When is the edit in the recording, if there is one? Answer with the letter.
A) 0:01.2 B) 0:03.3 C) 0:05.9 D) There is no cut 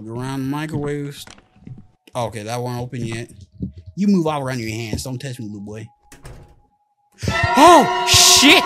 D